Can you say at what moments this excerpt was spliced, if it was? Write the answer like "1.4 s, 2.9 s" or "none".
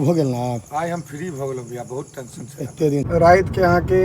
3.1 s